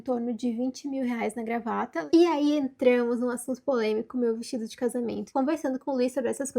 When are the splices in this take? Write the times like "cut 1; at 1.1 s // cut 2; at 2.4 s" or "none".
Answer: cut 1; at 2.0 s // cut 2; at 5.2 s